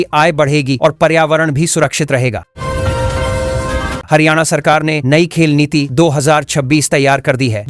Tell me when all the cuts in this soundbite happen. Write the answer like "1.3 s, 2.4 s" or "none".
2.5 s, 4.0 s